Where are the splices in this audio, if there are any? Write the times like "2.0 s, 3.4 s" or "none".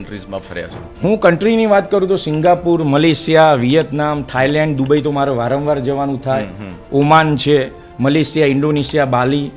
none